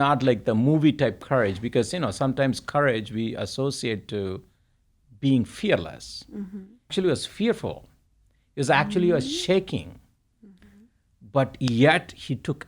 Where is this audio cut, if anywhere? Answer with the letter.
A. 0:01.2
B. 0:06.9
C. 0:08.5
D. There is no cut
B